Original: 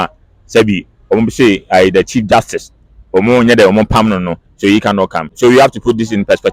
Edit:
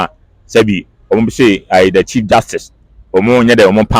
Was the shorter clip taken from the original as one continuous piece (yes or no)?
yes